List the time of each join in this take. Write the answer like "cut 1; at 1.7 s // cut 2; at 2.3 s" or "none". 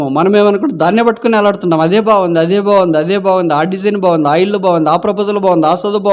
none